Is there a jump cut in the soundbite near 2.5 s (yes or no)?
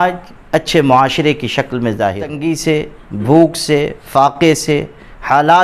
yes